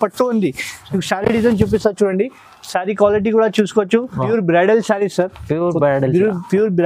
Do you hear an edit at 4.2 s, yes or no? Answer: yes